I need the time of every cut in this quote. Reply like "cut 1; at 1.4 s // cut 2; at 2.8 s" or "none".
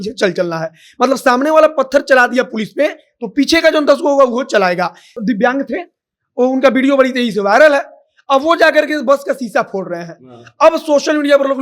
cut 1; at 5.2 s